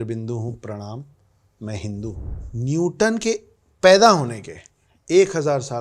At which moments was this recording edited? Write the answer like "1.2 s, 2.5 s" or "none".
2.3 s

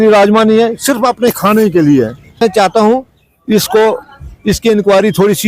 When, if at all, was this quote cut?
2.4 s

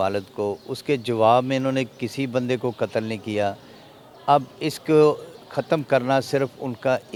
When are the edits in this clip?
none

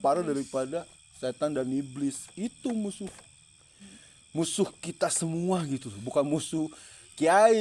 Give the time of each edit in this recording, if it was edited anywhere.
none

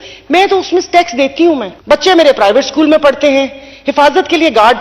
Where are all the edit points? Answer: 1.7 s

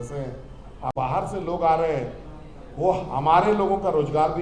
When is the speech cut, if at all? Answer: 0.9 s

